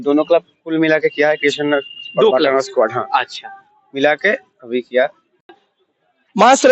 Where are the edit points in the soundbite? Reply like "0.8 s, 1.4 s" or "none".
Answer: 5.5 s